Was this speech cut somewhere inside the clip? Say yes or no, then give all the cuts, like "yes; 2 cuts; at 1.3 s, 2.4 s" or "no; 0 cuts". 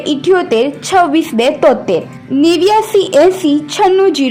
no; 0 cuts